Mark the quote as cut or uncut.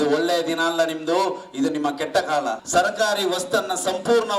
cut